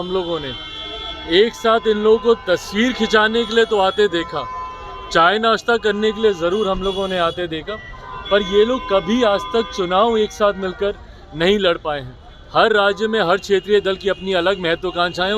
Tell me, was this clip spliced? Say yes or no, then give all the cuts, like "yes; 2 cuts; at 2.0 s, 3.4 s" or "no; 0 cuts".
no; 0 cuts